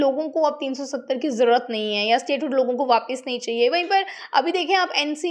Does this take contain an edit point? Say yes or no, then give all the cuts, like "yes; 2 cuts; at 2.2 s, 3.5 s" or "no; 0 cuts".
no; 0 cuts